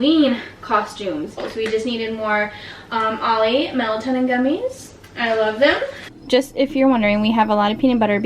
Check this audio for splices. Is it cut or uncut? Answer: cut